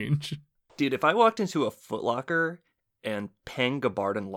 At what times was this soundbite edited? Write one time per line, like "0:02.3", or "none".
none